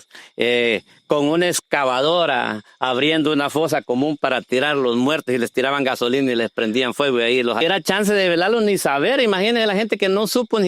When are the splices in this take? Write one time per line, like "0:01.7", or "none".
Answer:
0:07.6